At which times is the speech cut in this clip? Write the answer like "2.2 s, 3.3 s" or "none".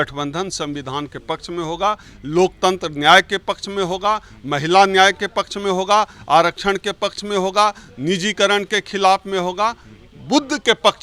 none